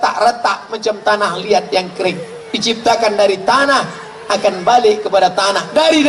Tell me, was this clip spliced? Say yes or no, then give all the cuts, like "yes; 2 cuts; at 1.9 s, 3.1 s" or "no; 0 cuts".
no; 0 cuts